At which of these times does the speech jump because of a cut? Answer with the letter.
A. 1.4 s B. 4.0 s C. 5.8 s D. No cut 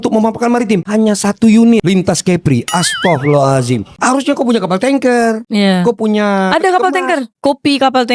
B